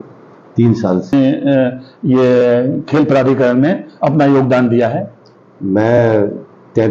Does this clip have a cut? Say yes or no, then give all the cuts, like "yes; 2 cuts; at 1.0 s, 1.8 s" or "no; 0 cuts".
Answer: yes; 1 cut; at 1.1 s